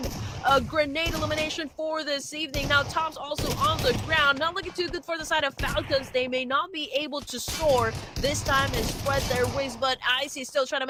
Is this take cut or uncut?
uncut